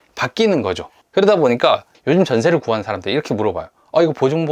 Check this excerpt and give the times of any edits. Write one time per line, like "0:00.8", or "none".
none